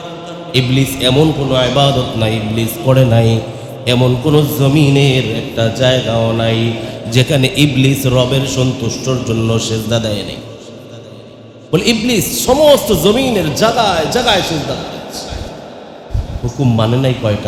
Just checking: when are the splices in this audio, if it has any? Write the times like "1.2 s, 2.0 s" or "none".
none